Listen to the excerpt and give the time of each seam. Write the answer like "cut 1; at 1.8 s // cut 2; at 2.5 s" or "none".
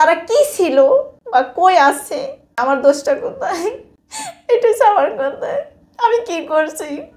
cut 1; at 1.2 s // cut 2; at 2.6 s // cut 3; at 4.5 s